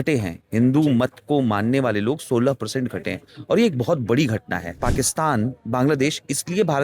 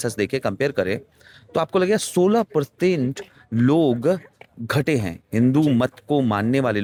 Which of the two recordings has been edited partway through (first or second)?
first